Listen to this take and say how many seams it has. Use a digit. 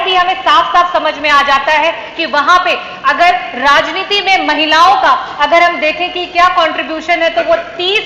0